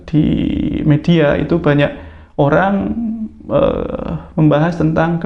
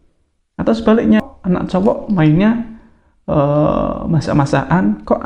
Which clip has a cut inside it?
second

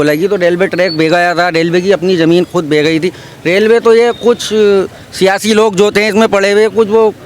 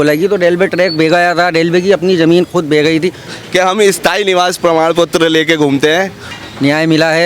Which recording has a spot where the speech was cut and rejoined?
second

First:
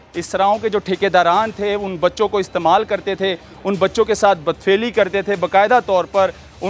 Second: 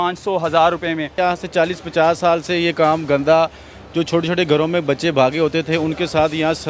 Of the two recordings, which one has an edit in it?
second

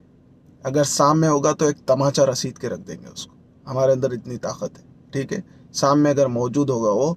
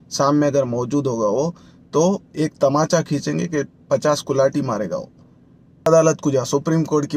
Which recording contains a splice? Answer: second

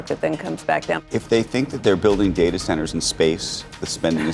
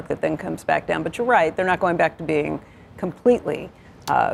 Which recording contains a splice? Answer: first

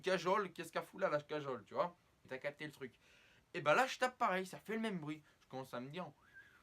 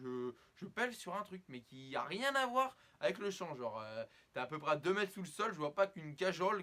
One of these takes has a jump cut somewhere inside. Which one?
first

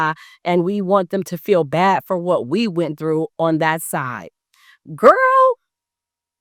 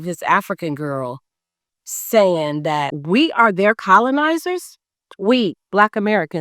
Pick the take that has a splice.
second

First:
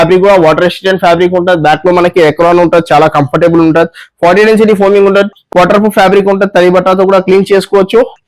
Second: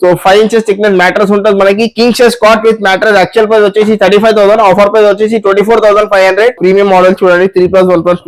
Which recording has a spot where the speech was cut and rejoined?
second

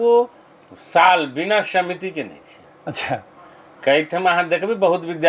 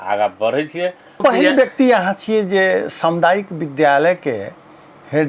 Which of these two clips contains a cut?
second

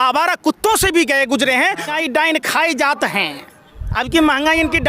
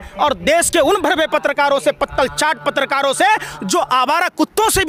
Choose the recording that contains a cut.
first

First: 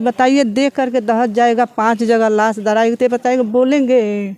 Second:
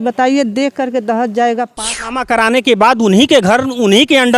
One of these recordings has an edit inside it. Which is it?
second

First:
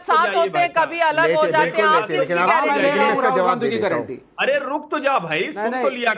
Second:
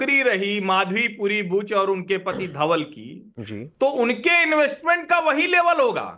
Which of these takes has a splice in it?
second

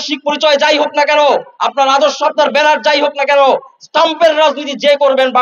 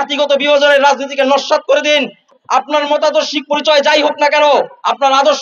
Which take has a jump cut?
second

